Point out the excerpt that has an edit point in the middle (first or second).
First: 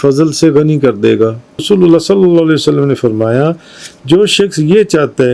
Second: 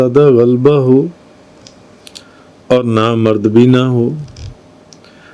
first